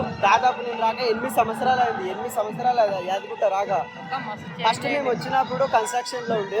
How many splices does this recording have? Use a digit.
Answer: 0